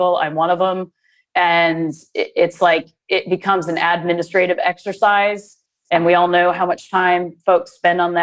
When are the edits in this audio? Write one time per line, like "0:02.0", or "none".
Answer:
none